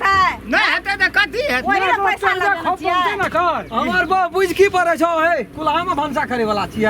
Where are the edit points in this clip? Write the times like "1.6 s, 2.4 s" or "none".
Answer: 5.5 s